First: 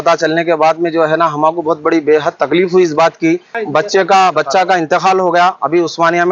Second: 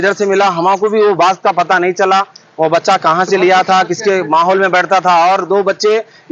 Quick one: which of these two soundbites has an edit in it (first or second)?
first